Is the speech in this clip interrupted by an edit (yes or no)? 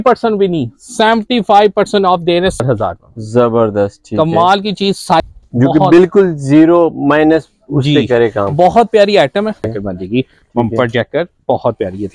yes